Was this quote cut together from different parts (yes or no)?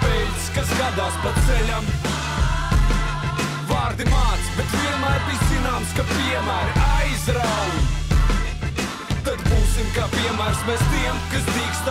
no